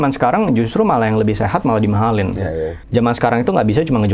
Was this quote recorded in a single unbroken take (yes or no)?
no